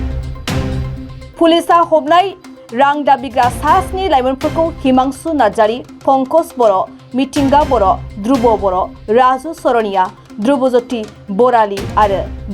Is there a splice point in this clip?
yes; 1 cut; at 1.2 s

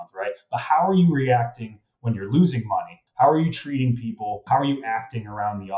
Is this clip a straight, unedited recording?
no; 2 cuts; at 3.0 s, 4.4 s

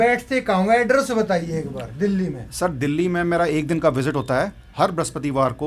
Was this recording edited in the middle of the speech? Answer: no; 0 cuts

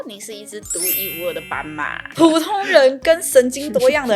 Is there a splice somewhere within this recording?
yes; 1 cut; at 2.0 s

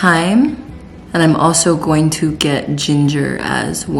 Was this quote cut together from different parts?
no; 0 cuts

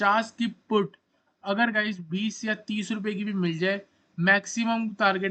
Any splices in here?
no; 0 cuts

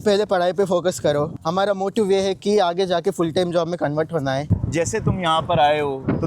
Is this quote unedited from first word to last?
no; 2 cuts; at 1.4 s, 4.5 s

